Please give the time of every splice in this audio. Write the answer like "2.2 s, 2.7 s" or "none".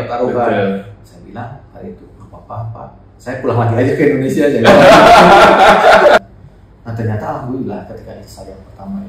6.2 s